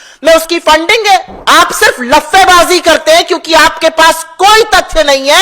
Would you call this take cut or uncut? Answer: cut